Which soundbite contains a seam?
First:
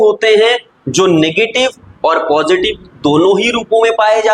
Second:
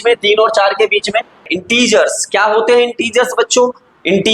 second; 1 cut; at 1.5 s

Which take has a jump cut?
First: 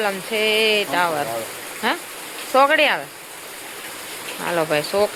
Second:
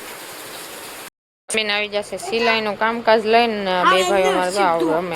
second; 1 cut; at 1.3 s

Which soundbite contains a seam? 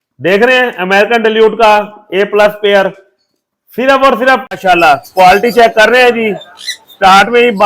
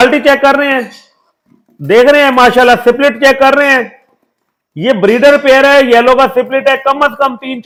first; 1 cut; at 4.4 s

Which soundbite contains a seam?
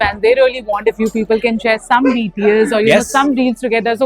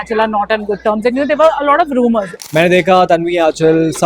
second; 1 cut; at 2.4 s

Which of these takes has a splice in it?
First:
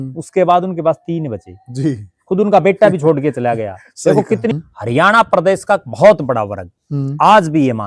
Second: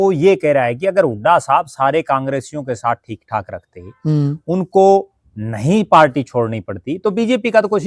first; 1 cut; at 4.5 s

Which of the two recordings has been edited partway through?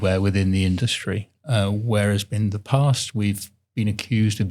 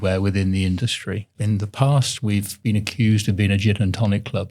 second; 2 cuts; at 1.4 s, 2.5 s

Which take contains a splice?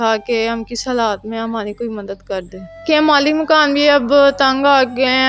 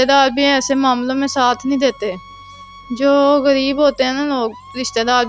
first; 1 cut; at 2.8 s

